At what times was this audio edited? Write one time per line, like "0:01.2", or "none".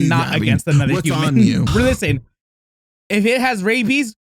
0:01.7